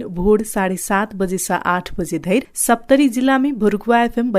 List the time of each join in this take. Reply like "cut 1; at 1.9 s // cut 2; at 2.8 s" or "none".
cut 1; at 2.5 s